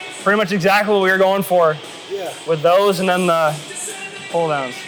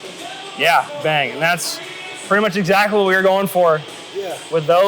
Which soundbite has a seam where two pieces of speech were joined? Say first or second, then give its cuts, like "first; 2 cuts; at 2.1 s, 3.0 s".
second; 1 cut; at 0.9 s